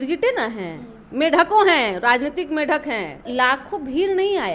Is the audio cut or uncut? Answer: cut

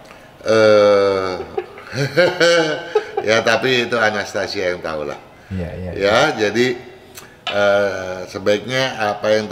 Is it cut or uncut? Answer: uncut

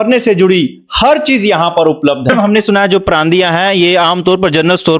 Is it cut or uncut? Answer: cut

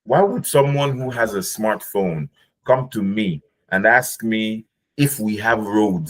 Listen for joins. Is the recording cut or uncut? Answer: uncut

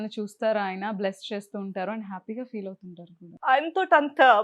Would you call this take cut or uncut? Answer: cut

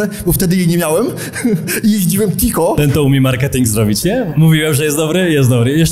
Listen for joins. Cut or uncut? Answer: cut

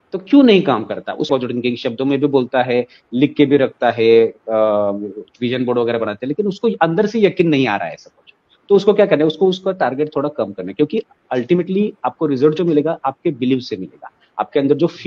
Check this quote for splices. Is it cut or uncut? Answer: cut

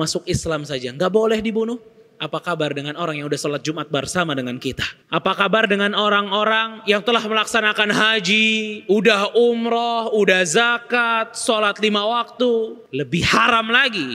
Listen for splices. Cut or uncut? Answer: cut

